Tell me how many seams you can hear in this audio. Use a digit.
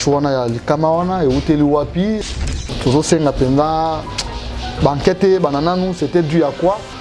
1